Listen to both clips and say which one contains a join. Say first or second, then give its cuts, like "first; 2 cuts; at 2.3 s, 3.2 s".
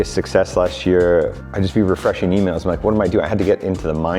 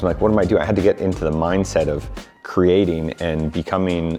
first; 1 cut; at 1.4 s